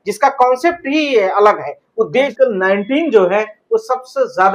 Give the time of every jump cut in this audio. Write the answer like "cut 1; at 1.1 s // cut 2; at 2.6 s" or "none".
cut 1; at 2.3 s